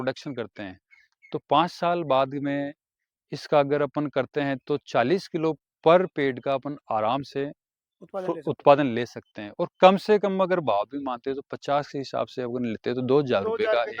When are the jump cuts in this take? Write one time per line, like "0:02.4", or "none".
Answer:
none